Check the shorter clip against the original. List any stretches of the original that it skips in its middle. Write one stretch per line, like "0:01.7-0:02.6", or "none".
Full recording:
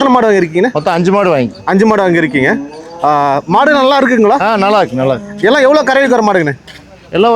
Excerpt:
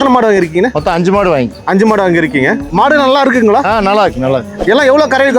0:02.7-0:03.4